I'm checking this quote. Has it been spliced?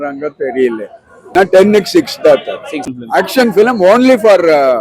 yes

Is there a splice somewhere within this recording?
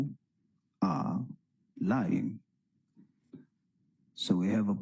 yes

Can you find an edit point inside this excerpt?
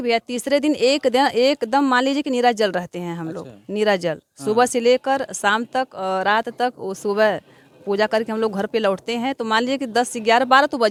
no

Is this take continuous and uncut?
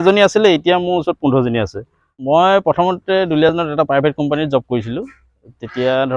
no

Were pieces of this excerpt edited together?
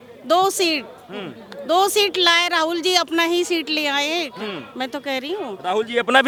no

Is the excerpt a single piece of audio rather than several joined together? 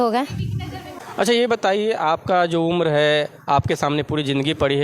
no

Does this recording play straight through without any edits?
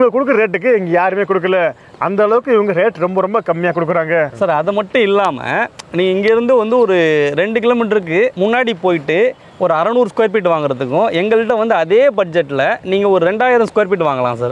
yes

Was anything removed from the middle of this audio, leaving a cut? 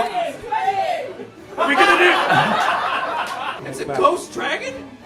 yes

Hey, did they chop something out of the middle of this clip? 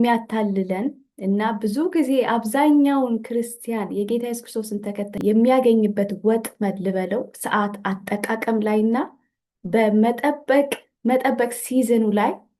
yes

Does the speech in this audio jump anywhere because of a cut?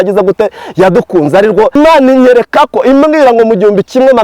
yes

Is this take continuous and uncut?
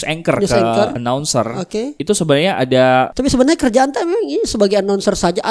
no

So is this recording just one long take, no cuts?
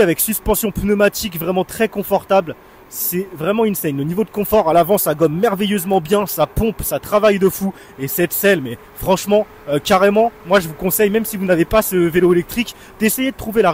yes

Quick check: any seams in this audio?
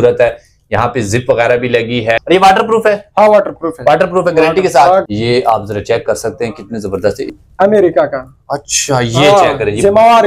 yes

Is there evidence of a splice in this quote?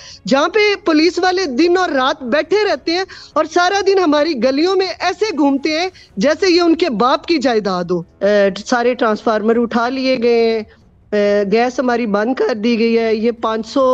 yes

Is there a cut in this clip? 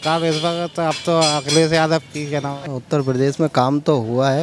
yes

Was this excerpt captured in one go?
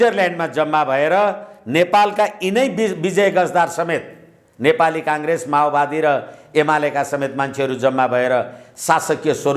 yes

